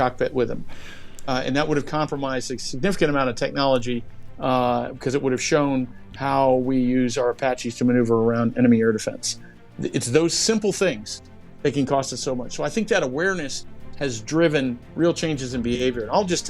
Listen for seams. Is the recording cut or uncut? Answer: uncut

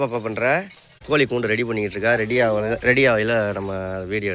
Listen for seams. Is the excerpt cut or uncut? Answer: cut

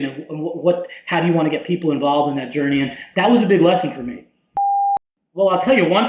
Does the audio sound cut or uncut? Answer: cut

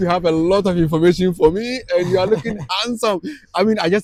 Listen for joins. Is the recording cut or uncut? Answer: uncut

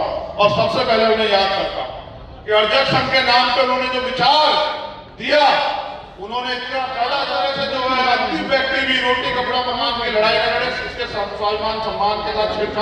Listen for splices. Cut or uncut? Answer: cut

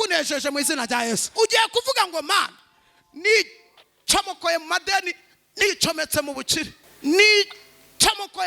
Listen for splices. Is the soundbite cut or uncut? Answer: cut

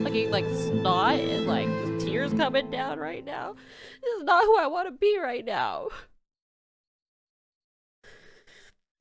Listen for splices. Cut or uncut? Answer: uncut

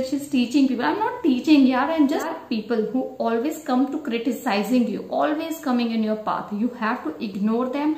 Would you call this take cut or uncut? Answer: cut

